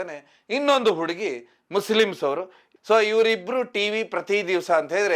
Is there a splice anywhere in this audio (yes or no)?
no